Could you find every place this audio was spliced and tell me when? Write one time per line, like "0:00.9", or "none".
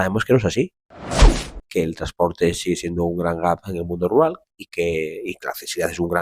0:01.4